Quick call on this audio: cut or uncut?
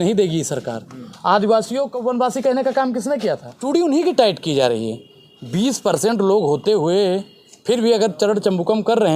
cut